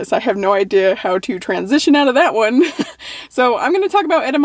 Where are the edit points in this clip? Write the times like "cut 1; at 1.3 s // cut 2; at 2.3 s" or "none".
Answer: none